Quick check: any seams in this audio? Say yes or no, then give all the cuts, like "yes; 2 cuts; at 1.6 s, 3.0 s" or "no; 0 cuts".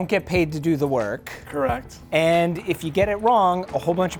no; 0 cuts